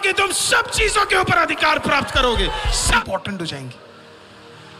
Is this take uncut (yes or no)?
no